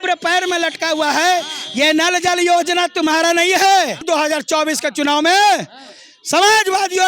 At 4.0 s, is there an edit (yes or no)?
yes